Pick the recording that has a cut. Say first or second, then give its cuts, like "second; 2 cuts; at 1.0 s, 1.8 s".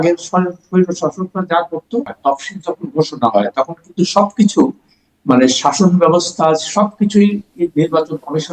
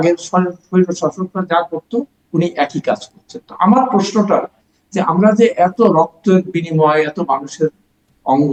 first; 1 cut; at 2.1 s